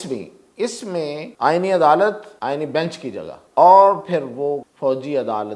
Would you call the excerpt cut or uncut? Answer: cut